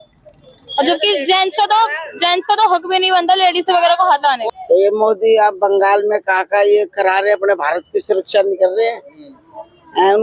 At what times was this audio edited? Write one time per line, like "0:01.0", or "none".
0:04.4